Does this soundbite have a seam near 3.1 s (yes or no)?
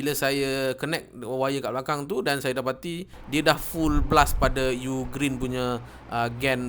yes